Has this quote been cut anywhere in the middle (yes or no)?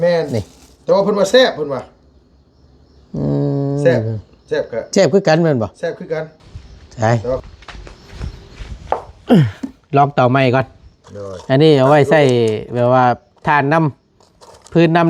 yes